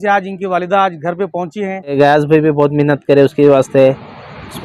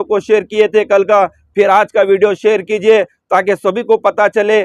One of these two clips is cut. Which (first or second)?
first